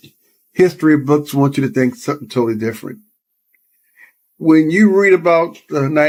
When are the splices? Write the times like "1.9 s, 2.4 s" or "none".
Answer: none